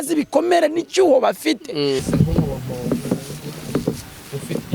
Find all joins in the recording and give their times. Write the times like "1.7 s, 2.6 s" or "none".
2.0 s